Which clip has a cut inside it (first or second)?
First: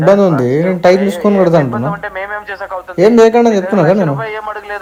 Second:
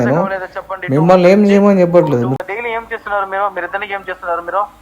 second